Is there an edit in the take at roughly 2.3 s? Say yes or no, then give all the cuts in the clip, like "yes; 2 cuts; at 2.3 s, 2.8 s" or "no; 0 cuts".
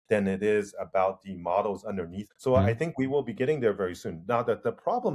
yes; 1 cut; at 2.3 s